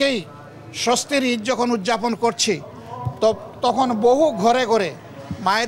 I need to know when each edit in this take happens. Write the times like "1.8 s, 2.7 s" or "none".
none